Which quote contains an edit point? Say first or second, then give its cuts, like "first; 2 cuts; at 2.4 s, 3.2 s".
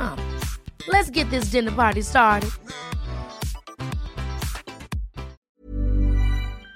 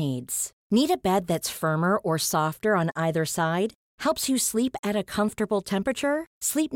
first; 1 cut; at 5.4 s